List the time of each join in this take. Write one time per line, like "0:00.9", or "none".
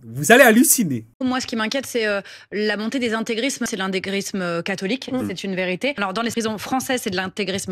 0:03.7
0:06.2

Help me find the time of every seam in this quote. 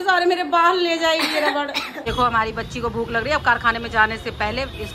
0:02.0

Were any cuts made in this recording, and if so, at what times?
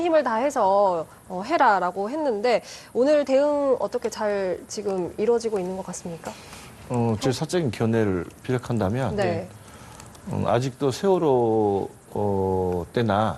none

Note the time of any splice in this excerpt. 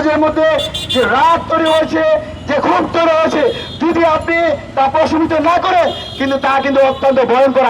none

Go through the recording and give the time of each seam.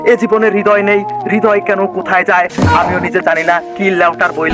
none

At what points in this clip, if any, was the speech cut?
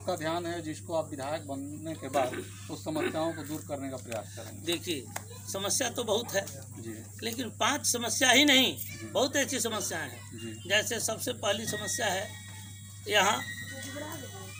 none

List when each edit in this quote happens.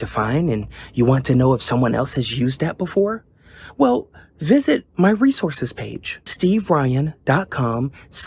none

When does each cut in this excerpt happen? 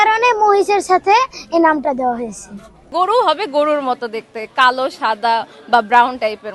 0:02.9

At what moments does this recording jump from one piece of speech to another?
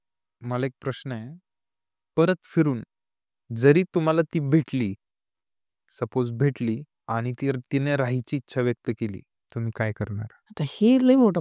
0:06.9
0:09.4
0:10.4

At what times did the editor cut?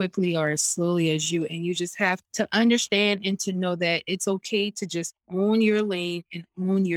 0:02.2

